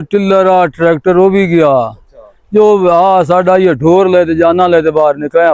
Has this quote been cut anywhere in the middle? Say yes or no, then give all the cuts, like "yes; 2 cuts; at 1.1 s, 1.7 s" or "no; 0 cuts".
no; 0 cuts